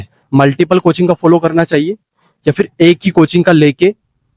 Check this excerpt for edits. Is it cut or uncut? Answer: uncut